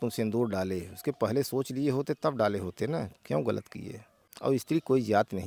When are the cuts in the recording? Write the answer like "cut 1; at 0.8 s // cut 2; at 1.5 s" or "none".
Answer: none